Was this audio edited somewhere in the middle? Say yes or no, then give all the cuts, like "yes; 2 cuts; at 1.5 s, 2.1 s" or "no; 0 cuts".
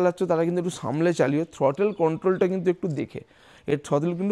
no; 0 cuts